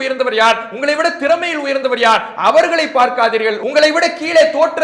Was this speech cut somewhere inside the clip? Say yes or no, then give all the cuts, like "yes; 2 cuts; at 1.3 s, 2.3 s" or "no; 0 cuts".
yes; 1 cut; at 3.6 s